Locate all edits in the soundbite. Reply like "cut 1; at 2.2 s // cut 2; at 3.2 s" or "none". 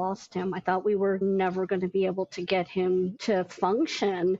cut 1; at 1.2 s